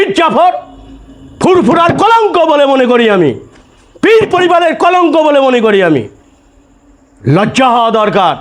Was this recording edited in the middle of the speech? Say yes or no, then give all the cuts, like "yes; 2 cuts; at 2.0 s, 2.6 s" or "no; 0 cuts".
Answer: no; 0 cuts